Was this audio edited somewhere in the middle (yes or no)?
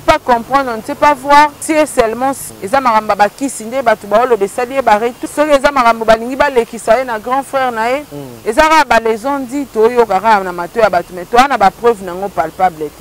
yes